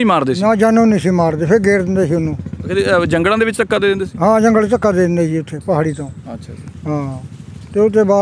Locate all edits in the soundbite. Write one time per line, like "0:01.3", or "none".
none